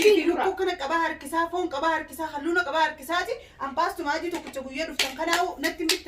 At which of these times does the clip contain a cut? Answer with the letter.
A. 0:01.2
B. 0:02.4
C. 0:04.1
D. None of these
D